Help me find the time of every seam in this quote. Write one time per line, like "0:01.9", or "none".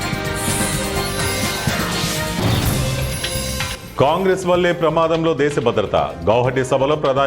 0:03.7